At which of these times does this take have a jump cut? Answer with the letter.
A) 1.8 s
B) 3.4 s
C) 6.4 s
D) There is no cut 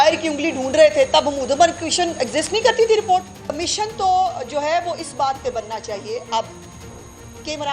B